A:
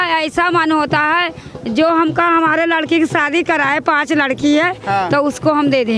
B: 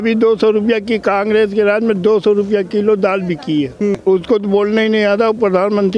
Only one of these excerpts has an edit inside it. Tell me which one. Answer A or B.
B